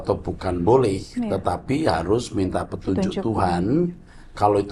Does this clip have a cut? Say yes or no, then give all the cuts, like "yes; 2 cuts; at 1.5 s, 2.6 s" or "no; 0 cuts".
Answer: no; 0 cuts